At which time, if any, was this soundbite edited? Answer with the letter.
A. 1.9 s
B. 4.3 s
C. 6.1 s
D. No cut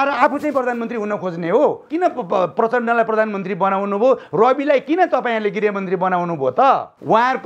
A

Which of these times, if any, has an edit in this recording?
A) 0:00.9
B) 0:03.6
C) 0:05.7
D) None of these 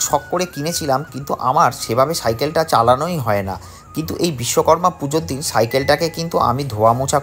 D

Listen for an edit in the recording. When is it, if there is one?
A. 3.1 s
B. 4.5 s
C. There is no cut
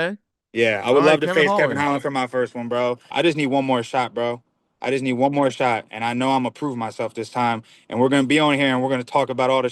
A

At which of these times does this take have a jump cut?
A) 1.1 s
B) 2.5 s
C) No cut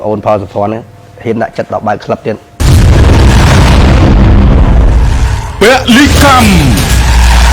B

